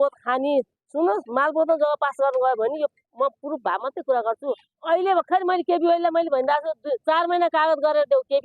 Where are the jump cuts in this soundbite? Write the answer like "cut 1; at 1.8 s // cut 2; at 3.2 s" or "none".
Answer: cut 1; at 4.7 s